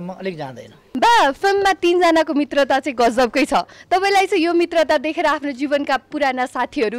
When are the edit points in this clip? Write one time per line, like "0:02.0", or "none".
0:00.9